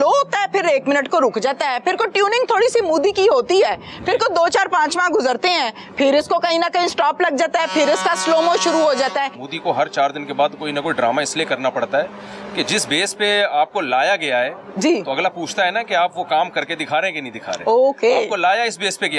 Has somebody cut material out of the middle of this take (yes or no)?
yes